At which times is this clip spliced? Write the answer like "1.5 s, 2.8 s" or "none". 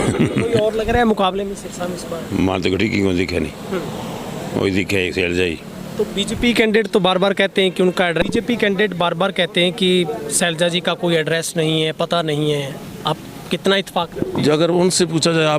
8.2 s